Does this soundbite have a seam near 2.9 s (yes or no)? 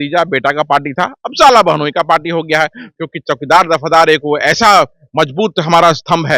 yes